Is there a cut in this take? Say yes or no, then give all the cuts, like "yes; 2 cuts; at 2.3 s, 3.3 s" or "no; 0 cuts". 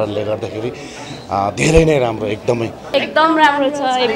yes; 1 cut; at 2.8 s